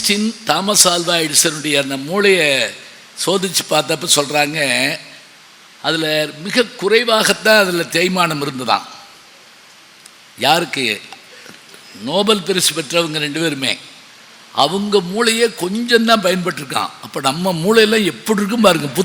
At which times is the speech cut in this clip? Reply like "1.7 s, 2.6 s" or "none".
none

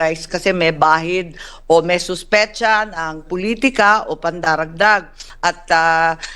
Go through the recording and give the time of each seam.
5.2 s

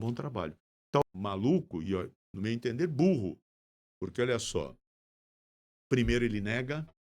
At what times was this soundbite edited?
1.0 s

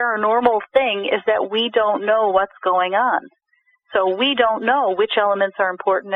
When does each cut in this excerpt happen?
none

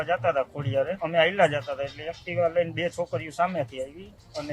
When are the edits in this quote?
1.0 s

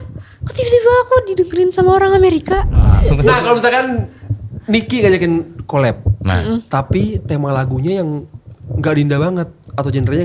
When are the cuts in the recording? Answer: 3.0 s

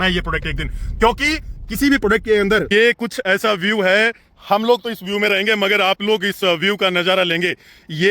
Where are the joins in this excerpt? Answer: 2.7 s

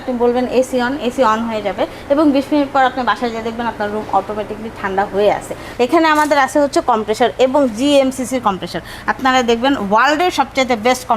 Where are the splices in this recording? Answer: 5.6 s

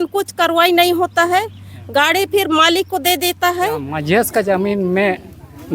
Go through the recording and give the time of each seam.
3.9 s

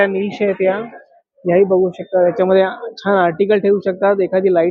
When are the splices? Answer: none

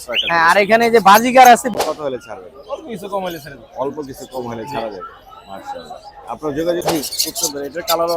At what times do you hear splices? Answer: 1.7 s, 6.8 s

